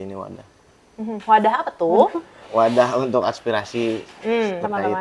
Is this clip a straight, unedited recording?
yes; 0 cuts

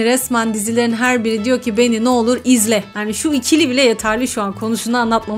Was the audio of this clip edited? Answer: no; 0 cuts

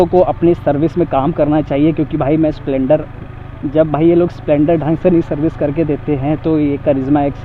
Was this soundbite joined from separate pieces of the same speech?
no; 0 cuts

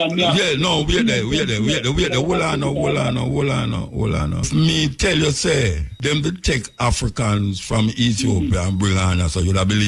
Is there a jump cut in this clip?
yes; 2 cuts; at 4.5 s, 5.9 s

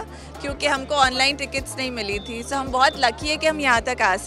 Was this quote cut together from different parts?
no; 0 cuts

